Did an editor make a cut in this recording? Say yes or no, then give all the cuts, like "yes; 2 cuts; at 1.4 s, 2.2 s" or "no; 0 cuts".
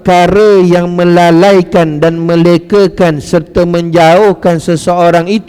no; 0 cuts